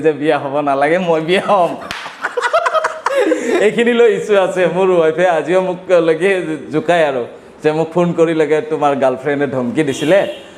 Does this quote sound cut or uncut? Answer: uncut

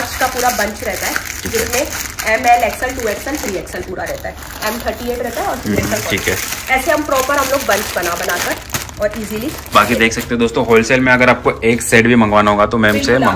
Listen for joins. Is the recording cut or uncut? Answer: uncut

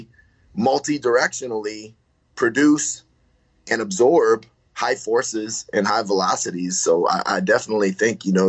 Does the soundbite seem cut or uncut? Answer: uncut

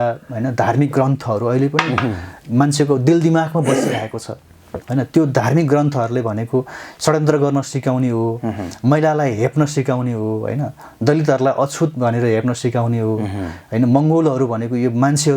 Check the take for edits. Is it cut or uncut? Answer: uncut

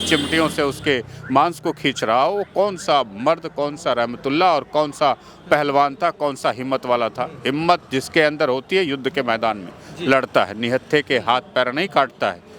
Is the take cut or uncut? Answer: uncut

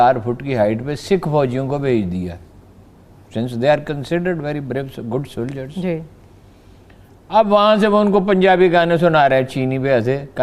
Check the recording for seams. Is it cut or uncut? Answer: uncut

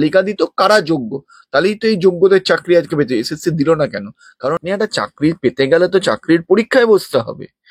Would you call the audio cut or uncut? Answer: cut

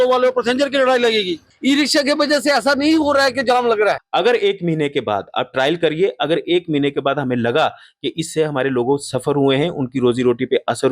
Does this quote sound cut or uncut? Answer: cut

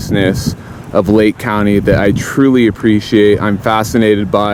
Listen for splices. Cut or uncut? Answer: uncut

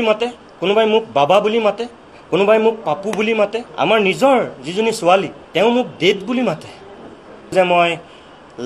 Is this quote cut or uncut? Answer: cut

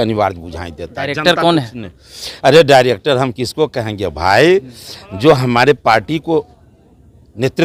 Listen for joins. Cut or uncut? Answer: uncut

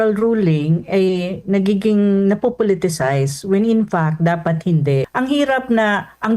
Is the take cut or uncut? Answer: cut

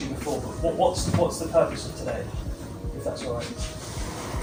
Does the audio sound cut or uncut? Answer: uncut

